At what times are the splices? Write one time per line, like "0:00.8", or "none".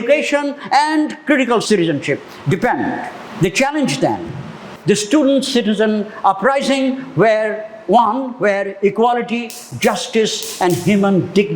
0:01.6
0:04.5